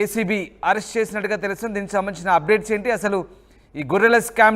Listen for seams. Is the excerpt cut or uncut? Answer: uncut